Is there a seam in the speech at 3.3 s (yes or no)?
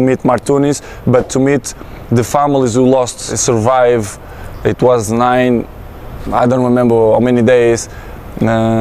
yes